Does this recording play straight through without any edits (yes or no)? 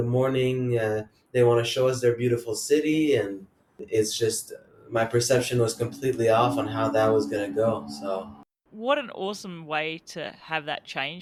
yes